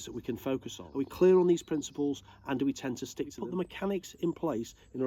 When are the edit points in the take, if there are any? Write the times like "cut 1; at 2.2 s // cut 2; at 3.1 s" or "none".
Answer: cut 1; at 0.9 s // cut 2; at 3.4 s